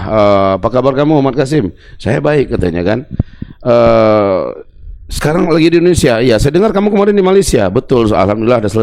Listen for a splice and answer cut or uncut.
uncut